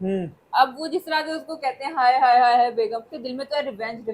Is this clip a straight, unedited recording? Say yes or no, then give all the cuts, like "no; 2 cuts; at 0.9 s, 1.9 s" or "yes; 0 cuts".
no; 1 cut; at 3.1 s